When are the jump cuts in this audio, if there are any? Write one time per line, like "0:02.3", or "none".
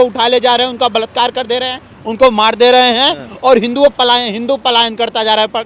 none